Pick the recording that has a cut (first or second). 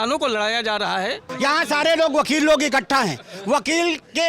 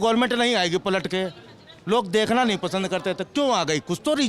first